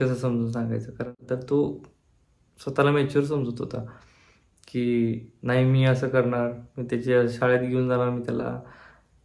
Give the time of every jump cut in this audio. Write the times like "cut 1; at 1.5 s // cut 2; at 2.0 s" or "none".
cut 1; at 1.2 s